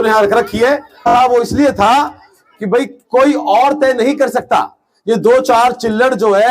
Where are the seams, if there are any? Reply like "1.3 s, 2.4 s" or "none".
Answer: 1.1 s